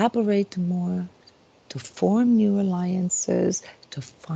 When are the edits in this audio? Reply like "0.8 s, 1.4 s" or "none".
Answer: none